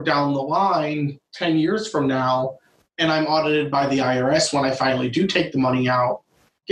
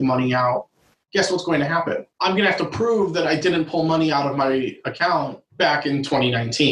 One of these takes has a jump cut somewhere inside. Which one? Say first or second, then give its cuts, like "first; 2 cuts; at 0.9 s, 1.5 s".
second; 2 cuts; at 2.1 s, 5.4 s